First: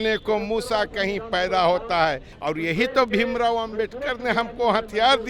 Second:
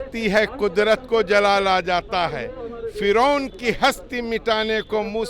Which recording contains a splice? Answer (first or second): first